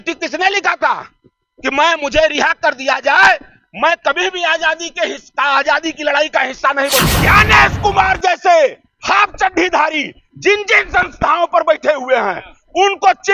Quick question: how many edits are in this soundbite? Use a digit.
1